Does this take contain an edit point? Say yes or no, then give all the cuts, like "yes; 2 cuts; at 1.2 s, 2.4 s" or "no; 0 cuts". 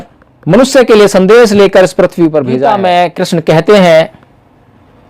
yes; 1 cut; at 2.6 s